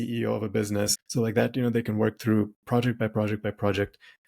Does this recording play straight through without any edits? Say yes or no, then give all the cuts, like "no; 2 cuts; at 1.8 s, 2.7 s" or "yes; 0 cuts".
no; 1 cut; at 1.0 s